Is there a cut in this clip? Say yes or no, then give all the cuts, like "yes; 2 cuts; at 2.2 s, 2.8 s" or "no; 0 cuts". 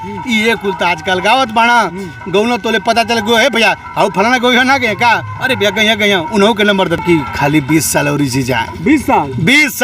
yes; 1 cut; at 7.0 s